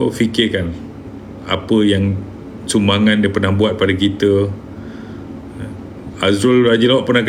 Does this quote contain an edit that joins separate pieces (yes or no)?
no